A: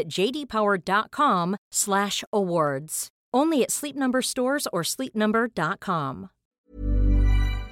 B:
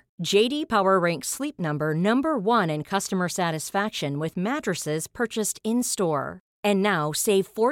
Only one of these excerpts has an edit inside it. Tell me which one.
A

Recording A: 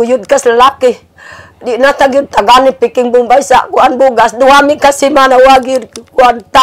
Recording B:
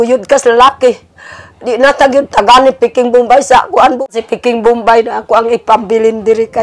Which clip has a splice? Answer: B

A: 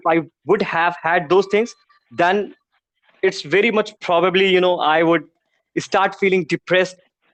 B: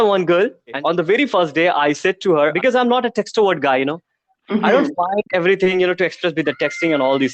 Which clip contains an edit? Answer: B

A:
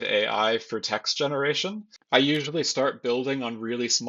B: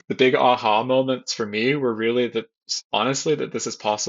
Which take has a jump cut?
A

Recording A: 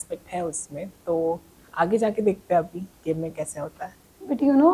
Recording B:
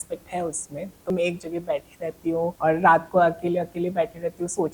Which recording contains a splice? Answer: B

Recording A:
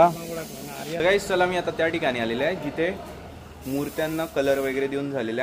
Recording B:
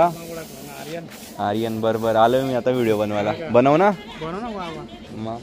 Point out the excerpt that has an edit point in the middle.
A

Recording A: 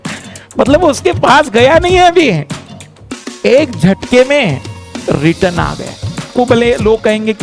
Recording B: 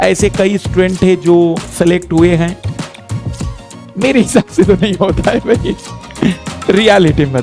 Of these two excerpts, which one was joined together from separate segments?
A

